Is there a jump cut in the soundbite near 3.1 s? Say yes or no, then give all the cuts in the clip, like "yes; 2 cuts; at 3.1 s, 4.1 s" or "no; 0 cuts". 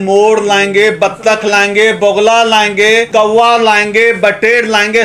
yes; 1 cut; at 3.1 s